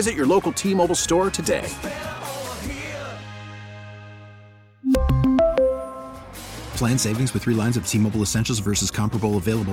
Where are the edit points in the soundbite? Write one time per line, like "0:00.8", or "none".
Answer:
none